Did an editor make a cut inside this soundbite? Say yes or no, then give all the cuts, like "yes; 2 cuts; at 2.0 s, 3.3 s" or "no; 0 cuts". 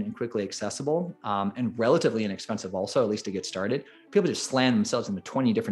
no; 0 cuts